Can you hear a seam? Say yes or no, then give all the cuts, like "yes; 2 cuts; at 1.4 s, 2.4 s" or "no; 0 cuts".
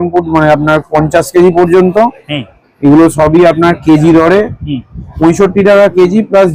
no; 0 cuts